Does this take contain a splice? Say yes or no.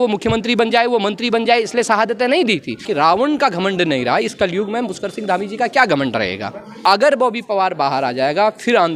yes